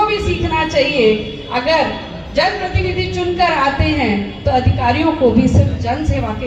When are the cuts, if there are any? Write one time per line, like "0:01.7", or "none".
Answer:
none